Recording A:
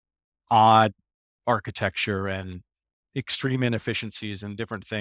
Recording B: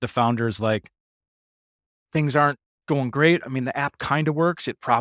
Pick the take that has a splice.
B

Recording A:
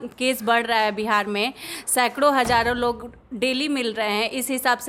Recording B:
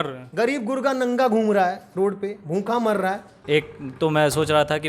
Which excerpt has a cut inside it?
B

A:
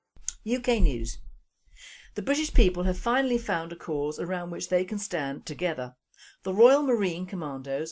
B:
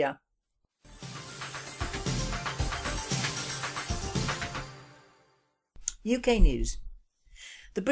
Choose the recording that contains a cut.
A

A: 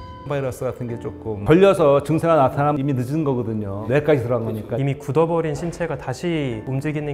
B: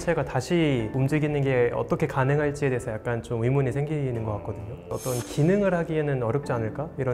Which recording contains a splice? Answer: A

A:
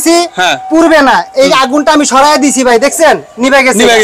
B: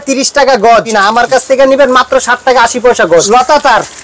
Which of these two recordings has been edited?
B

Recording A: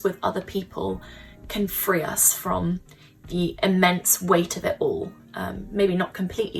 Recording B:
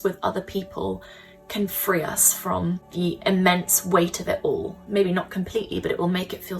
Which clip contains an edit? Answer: B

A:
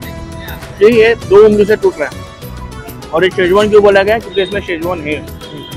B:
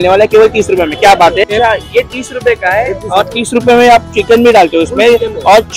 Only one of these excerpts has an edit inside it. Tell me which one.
B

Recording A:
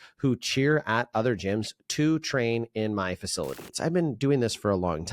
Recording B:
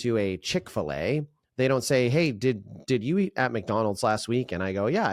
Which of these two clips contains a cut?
A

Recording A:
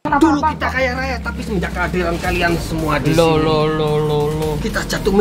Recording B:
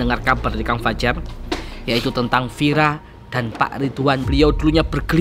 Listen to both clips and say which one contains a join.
B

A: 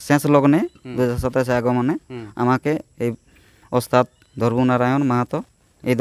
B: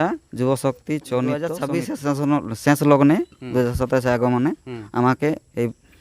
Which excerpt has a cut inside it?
B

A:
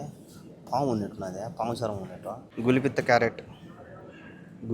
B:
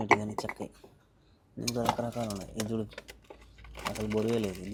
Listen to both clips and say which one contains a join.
A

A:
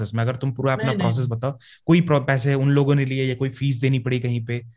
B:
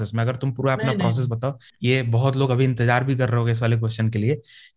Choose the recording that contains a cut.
B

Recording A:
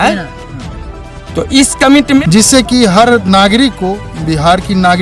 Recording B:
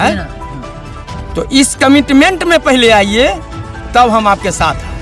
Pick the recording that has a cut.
A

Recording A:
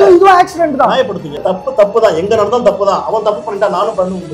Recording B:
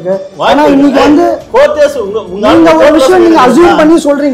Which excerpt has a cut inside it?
A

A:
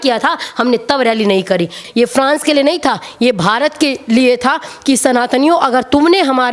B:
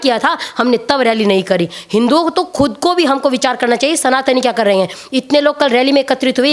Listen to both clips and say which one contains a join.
A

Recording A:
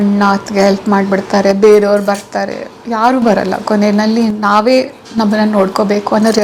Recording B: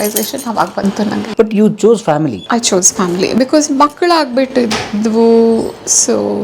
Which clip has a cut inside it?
B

